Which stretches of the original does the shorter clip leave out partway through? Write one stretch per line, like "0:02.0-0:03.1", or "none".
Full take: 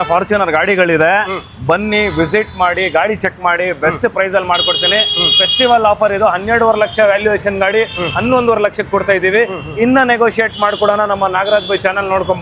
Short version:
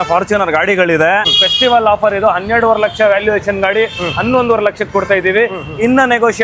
0:01.3-0:05.3